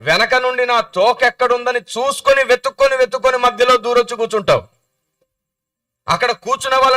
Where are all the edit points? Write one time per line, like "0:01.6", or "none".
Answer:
none